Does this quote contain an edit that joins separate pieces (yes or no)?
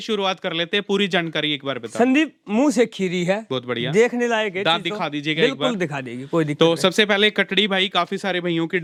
no